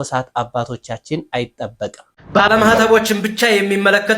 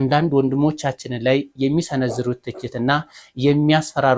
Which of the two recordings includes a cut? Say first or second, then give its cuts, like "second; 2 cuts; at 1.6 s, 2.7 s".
first; 1 cut; at 2.0 s